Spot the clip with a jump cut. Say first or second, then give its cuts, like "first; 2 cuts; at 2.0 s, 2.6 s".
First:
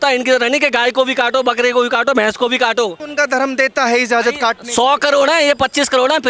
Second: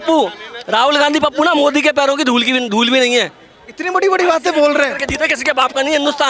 first; 1 cut; at 3.0 s